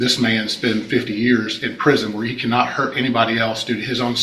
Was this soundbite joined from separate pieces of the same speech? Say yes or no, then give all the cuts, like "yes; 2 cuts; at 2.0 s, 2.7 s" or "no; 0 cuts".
no; 0 cuts